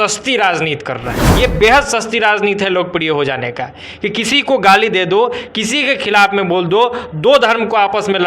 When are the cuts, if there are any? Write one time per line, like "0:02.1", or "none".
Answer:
0:01.2